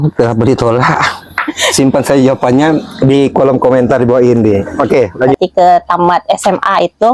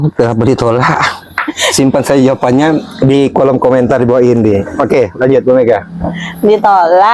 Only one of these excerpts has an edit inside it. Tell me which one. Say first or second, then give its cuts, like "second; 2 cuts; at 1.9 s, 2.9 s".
first; 1 cut; at 5.3 s